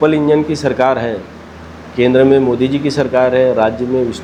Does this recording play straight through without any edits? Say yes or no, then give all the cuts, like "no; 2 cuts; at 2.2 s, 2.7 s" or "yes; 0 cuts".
yes; 0 cuts